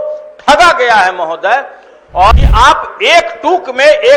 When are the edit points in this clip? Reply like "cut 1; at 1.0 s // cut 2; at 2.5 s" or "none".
cut 1; at 2.3 s